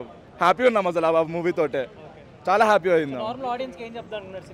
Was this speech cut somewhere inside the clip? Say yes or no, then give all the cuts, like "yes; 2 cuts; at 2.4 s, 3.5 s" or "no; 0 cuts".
no; 0 cuts